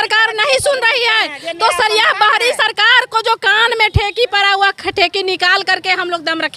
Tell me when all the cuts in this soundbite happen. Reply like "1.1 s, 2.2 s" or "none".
none